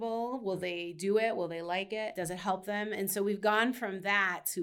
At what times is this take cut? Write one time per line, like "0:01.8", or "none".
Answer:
0:02.2